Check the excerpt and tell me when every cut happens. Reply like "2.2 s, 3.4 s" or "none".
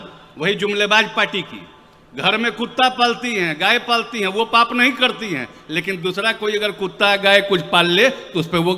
none